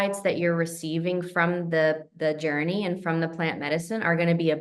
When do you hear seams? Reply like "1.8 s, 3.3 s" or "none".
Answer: none